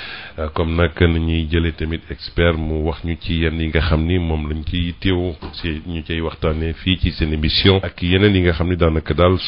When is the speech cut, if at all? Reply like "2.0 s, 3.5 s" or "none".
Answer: 7.9 s